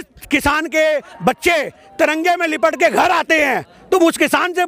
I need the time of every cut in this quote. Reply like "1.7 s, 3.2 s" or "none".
none